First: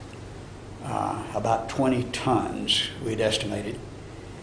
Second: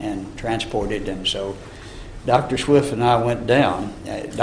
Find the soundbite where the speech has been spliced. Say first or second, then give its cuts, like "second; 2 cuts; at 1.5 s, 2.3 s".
second; 1 cut; at 2.1 s